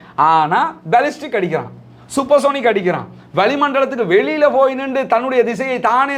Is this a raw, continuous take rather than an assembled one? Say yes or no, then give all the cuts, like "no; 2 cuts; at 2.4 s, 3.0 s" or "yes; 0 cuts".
yes; 0 cuts